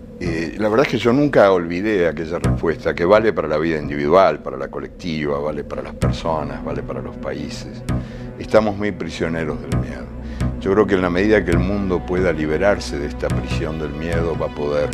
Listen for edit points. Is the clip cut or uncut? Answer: cut